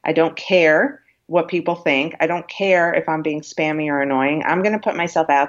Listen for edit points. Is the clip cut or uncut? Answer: uncut